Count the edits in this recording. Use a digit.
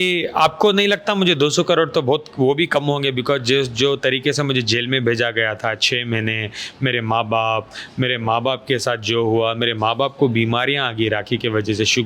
0